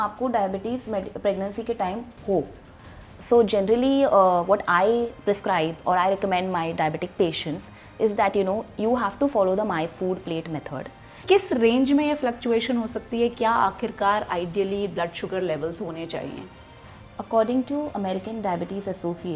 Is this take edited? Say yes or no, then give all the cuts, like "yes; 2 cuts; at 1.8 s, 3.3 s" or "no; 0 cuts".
yes; 2 cuts; at 3.1 s, 11.2 s